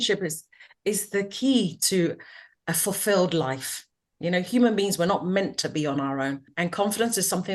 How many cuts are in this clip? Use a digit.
1